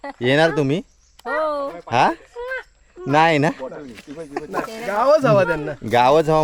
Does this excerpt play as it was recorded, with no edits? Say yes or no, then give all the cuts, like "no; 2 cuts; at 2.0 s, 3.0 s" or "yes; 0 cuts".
yes; 0 cuts